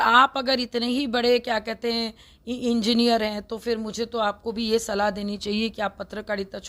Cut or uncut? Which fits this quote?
uncut